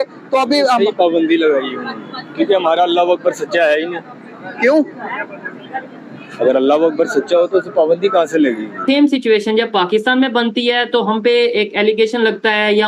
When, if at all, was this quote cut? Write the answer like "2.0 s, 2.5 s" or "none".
8.8 s